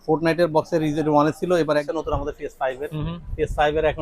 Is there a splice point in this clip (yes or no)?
yes